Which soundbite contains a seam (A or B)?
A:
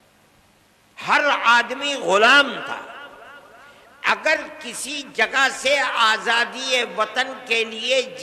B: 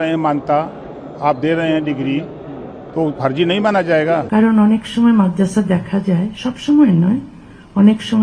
B